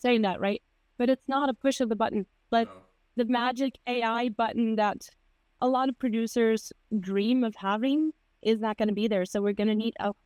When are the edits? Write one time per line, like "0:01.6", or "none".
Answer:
none